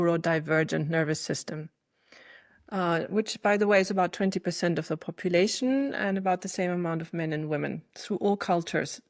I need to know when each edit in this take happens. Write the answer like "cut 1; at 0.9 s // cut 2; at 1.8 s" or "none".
none